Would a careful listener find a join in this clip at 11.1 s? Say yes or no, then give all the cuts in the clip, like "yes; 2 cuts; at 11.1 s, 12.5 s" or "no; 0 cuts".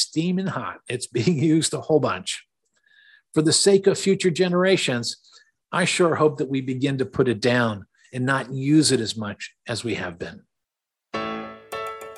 yes; 1 cut; at 11.1 s